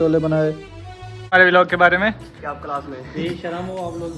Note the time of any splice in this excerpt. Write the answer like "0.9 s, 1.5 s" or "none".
1.3 s